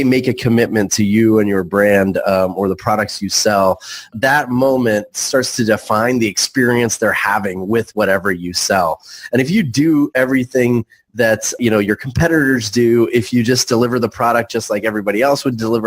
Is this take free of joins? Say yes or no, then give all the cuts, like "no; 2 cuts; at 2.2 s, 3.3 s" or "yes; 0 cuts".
no; 2 cuts; at 4.1 s, 11.6 s